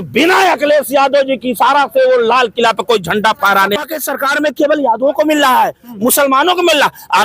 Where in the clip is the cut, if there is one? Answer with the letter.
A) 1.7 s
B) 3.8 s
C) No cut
B